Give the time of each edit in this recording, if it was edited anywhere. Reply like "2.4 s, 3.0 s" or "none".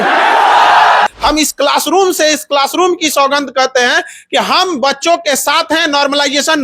1.1 s